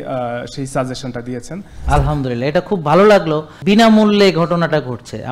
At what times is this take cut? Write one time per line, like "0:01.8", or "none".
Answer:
0:01.7
0:03.5